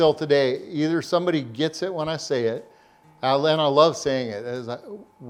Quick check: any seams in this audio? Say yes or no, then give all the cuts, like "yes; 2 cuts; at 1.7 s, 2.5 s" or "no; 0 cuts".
no; 0 cuts